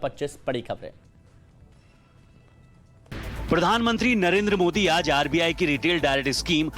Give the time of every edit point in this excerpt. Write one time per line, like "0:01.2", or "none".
0:04.8

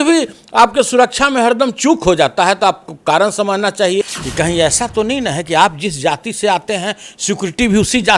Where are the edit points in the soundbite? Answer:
0:04.2

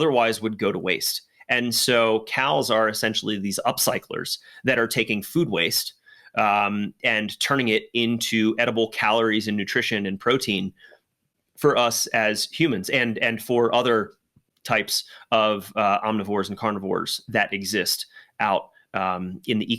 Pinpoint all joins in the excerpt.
none

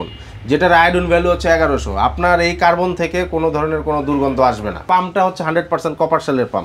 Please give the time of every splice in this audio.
0:04.8

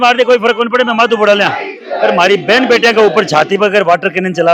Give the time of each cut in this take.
none

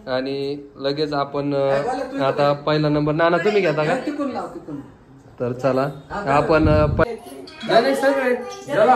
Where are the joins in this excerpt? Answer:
0:07.0

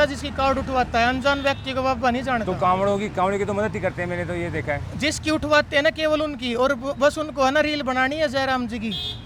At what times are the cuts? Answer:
none

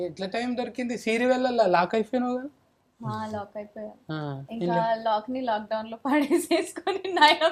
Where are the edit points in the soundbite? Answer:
none

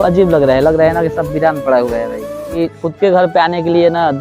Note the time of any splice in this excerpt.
0:02.6

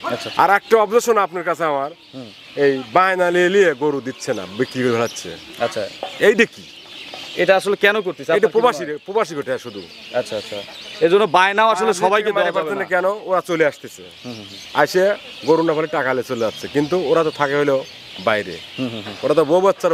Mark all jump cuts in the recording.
none

